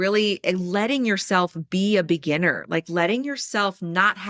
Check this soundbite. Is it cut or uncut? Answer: uncut